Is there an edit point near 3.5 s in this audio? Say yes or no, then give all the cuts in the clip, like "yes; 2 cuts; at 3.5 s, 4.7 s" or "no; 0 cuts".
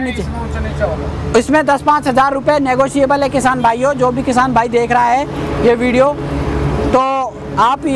no; 0 cuts